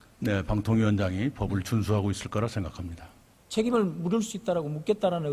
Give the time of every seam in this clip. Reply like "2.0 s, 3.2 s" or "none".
1.9 s